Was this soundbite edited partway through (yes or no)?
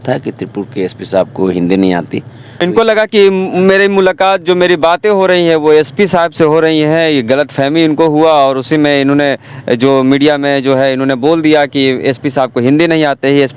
yes